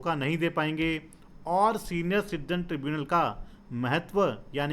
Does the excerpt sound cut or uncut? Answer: uncut